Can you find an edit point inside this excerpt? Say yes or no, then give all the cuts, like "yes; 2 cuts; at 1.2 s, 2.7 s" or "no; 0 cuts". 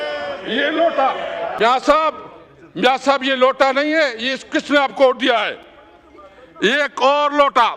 no; 0 cuts